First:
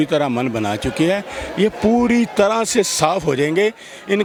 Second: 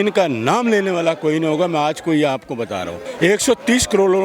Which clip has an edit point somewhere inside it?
second; 1 cut; at 3.0 s

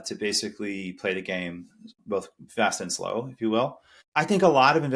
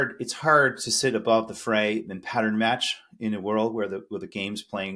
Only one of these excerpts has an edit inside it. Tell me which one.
first; 1 cut; at 4.0 s

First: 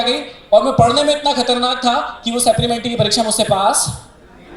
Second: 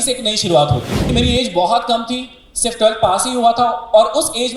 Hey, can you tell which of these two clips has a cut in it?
second; 1 cut; at 0.9 s

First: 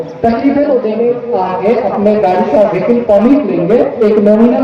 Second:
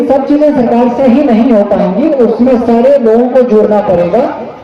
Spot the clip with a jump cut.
first; 1 cut; at 1.0 s

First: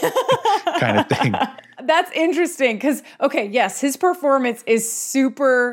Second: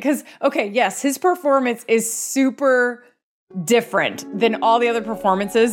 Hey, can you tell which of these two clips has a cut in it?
first; 1 cut; at 1.7 s

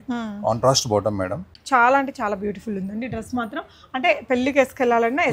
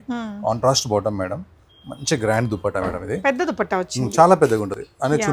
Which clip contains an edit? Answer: first; 1 cut; at 1.5 s

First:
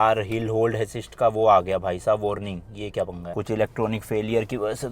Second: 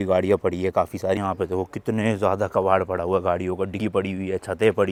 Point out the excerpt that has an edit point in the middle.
first; 1 cut; at 3.2 s

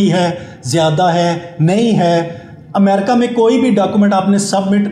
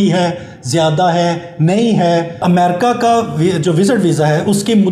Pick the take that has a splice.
second; 1 cut; at 2.3 s

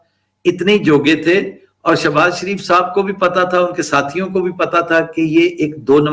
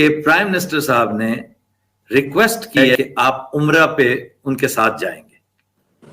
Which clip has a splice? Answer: second; 1 cut; at 3.0 s

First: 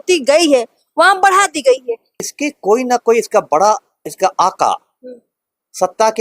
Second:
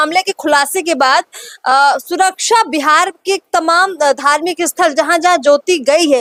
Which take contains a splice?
first; 1 cut; at 2.1 s

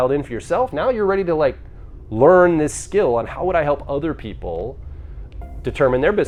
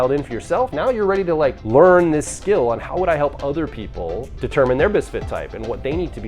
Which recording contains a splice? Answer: second; 2 cuts; at 1.6 s, 4.3 s

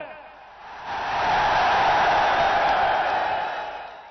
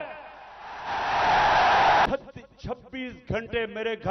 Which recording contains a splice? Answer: second; 1 cut; at 2.1 s

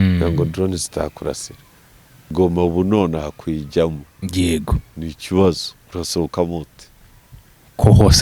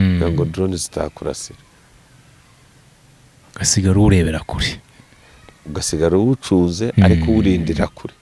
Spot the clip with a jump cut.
first; 1 cut; at 2.3 s

